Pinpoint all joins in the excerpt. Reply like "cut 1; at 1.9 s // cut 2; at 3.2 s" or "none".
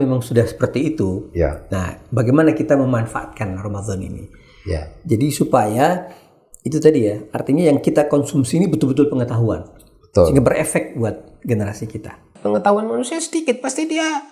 cut 1; at 12.3 s